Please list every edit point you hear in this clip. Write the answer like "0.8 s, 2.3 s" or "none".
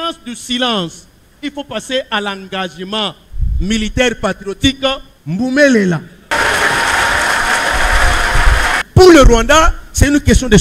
6.3 s, 8.8 s